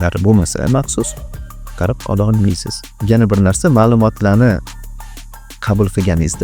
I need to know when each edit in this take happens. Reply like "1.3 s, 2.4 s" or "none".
2.9 s